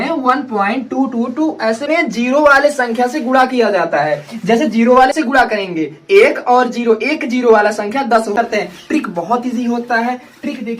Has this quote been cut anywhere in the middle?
yes; 3 cuts; at 1.9 s, 5.1 s, 8.3 s

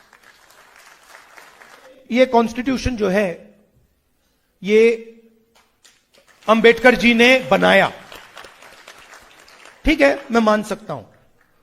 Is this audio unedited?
no; 1 cut; at 1.9 s

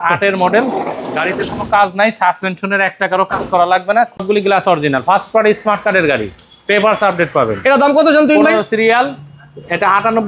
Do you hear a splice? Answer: yes; 1 cut; at 4.2 s

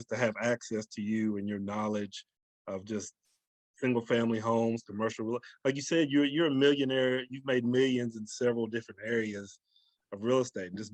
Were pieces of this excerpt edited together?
no; 0 cuts

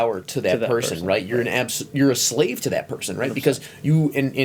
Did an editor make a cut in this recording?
no; 0 cuts

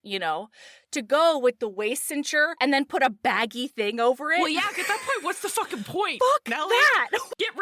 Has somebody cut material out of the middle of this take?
yes; 1 cut; at 2.5 s

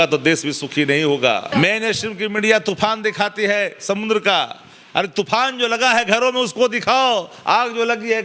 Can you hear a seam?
yes; 1 cut; at 1.5 s

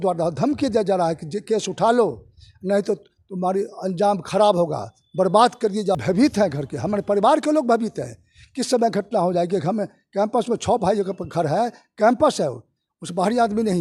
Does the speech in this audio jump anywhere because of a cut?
yes; 1 cut; at 6.0 s

